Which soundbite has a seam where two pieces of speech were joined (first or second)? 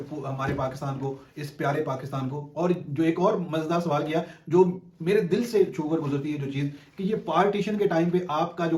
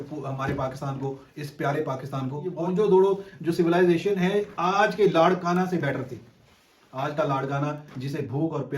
second